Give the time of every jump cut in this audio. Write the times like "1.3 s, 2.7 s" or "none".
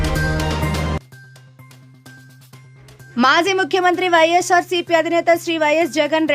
2.7 s